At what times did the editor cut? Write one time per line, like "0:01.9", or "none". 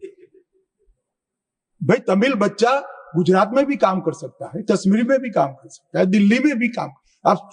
none